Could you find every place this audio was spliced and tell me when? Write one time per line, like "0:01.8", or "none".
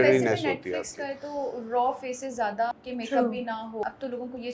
0:02.7
0:03.8